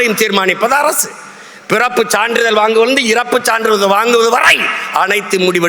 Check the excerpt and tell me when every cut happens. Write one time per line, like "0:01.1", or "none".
none